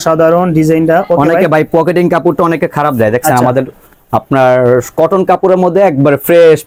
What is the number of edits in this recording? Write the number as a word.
zero